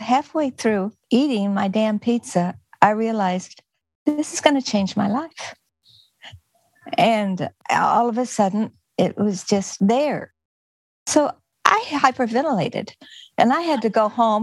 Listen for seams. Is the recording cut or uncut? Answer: uncut